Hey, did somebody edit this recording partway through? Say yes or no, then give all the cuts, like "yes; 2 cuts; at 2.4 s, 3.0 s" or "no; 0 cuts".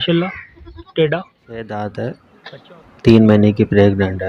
yes; 1 cut; at 1.7 s